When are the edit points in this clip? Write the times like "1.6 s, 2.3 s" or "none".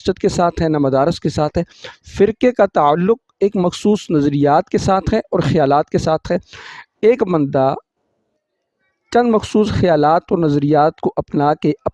none